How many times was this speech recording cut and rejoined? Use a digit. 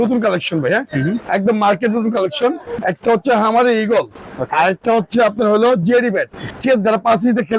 2